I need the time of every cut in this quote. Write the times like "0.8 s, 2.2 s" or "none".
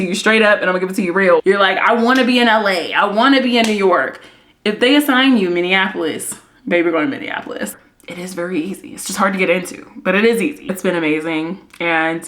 1.4 s, 7.7 s, 10.6 s